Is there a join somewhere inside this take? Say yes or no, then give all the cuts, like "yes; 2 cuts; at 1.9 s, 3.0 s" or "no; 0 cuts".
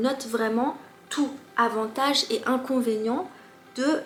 no; 0 cuts